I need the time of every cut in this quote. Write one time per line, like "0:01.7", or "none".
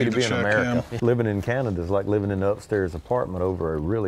0:00.9